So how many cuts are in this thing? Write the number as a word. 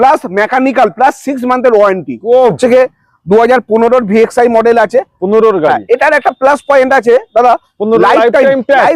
one